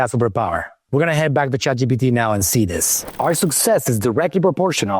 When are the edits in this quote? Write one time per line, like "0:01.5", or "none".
0:03.0